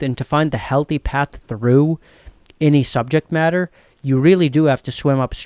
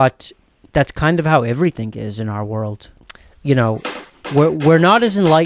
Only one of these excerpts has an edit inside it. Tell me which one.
second; 1 cut; at 2.9 s

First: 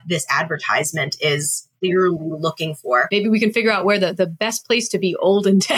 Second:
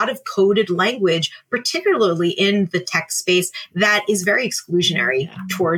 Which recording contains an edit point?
first; 2 cuts; at 1.8 s, 3.1 s

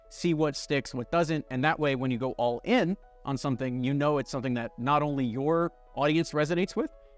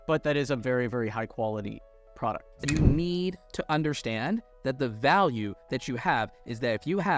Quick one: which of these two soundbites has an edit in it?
second; 1 cut; at 2.5 s

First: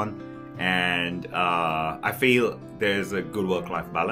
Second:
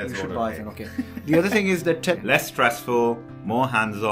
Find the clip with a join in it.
second; 1 cut; at 2.2 s

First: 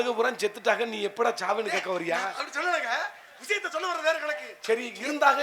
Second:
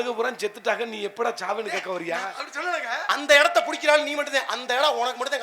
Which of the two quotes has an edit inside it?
second; 1 cut; at 3.1 s

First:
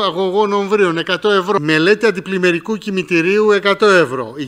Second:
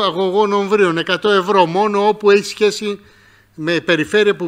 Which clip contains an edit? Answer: first; 1 cut; at 1.6 s

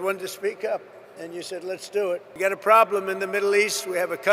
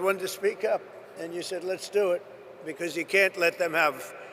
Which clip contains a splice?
first; 1 cut; at 2.3 s

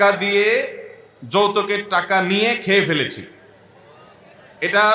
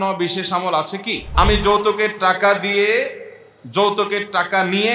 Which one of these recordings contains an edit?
second; 1 cut; at 1.3 s

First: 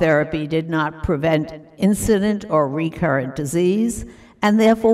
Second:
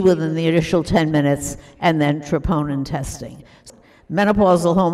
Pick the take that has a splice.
second; 1 cut; at 3.6 s

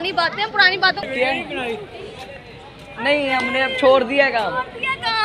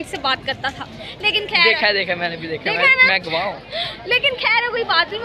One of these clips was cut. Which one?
first; 1 cut; at 1.1 s

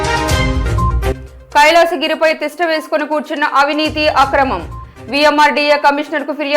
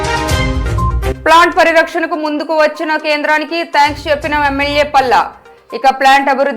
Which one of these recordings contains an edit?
first; 1 cut; at 1.1 s

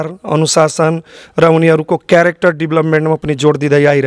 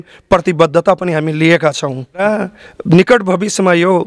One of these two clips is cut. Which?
second; 1 cut; at 2.2 s

